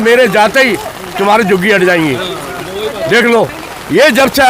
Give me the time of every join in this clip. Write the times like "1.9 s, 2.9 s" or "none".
none